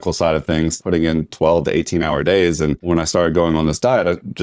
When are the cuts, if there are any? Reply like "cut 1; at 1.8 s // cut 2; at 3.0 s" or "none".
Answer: cut 1; at 0.8 s // cut 2; at 2.8 s